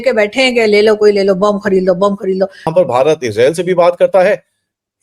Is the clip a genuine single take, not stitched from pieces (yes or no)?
no